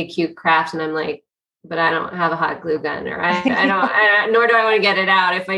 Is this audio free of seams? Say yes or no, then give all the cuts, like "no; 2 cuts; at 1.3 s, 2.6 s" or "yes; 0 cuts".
yes; 0 cuts